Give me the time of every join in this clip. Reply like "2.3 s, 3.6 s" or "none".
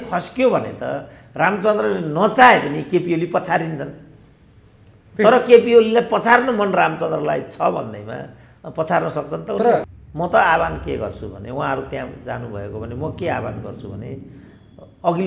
9.9 s